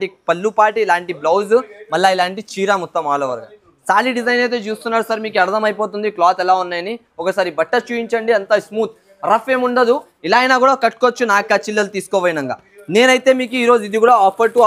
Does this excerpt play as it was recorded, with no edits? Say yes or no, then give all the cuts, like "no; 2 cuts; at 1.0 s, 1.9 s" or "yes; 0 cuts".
yes; 0 cuts